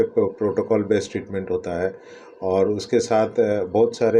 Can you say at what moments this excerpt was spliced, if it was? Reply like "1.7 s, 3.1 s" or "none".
none